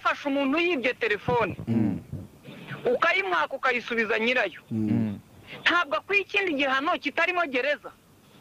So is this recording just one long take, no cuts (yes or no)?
yes